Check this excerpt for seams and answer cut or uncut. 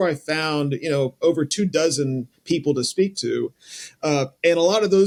uncut